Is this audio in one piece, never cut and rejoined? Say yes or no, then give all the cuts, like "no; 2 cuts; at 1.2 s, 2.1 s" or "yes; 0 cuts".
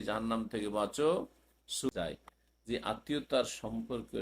no; 1 cut; at 1.9 s